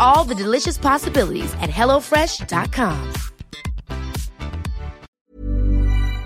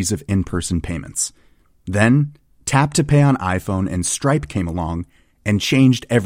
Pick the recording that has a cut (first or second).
first